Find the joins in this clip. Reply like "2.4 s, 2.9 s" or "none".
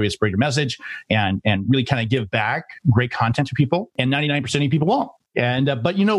3.9 s, 5.2 s